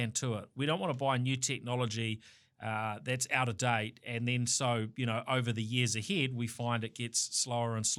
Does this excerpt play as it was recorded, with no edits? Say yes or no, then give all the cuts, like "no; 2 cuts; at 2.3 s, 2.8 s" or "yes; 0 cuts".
yes; 0 cuts